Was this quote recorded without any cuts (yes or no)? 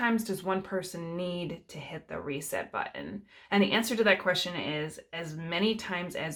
yes